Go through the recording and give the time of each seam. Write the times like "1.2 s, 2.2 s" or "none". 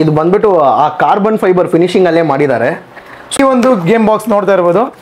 3.4 s

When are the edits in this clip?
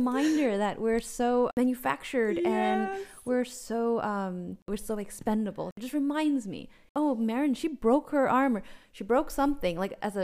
1.5 s, 4.7 s, 5.7 s, 6.8 s

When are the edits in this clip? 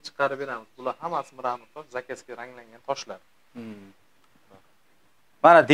none

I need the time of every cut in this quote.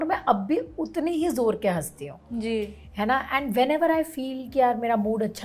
none

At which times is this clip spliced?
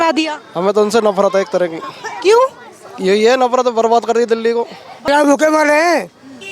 4.9 s

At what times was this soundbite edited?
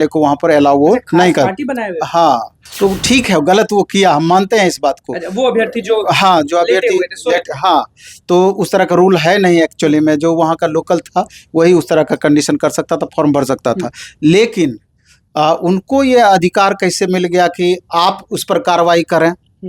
2.6 s

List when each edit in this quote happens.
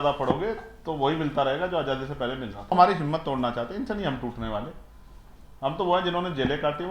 2.7 s

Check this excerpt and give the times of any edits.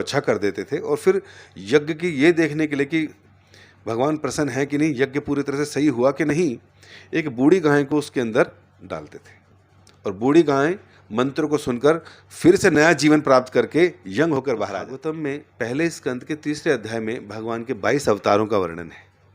14.9 s

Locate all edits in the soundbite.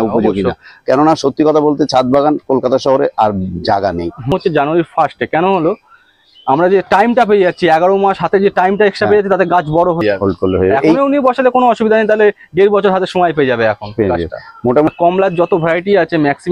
4.3 s, 10.0 s, 14.9 s

